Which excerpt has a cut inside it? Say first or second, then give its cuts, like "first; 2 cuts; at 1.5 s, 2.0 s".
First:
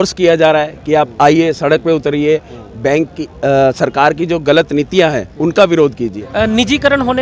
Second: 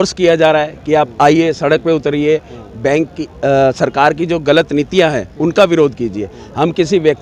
first; 1 cut; at 6.2 s